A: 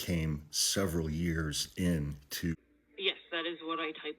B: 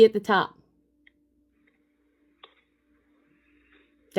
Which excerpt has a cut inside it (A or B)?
A